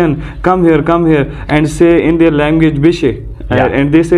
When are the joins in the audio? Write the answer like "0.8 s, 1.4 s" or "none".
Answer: none